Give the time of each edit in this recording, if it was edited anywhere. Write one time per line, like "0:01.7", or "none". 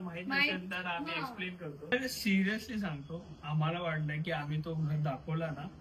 0:01.9